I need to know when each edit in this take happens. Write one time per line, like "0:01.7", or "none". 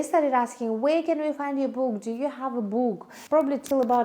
0:03.1